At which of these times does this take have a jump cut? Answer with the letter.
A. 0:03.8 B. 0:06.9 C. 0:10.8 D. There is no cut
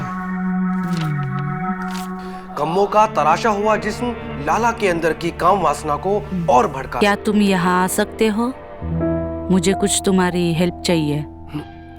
B